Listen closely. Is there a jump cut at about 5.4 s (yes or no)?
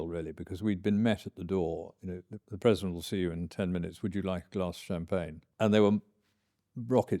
yes